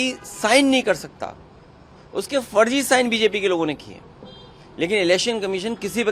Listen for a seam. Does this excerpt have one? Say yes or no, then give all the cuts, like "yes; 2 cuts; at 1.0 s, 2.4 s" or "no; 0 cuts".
no; 0 cuts